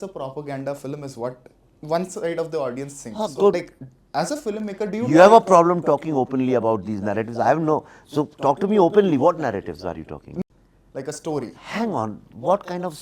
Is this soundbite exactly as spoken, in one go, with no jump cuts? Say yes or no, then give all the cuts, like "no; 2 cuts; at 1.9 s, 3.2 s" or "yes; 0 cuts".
no; 2 cuts; at 3.5 s, 10.4 s